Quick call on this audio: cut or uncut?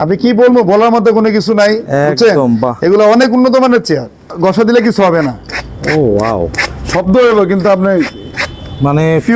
cut